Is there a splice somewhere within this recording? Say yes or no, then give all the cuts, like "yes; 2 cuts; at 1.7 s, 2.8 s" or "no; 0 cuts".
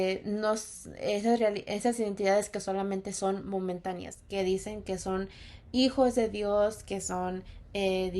yes; 1 cut; at 4.1 s